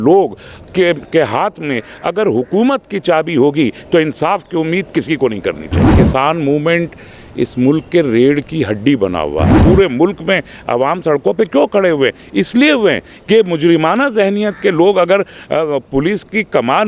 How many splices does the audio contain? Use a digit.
2